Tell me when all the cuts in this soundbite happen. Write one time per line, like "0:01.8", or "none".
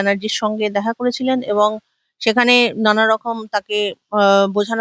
none